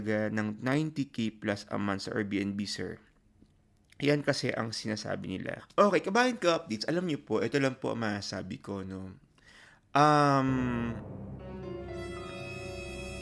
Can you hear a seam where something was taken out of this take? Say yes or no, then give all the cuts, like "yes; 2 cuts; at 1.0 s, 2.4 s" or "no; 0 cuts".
yes; 2 cuts; at 5.6 s, 10.9 s